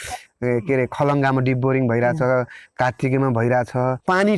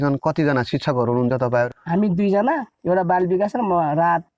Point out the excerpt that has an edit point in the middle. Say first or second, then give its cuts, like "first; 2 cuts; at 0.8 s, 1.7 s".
second; 1 cut; at 2.7 s